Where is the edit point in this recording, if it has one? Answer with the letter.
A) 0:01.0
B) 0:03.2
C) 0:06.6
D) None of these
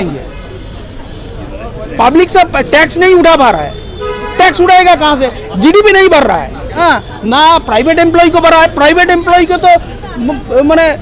C